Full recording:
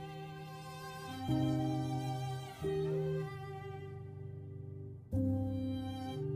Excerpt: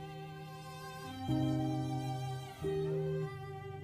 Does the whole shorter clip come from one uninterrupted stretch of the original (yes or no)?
yes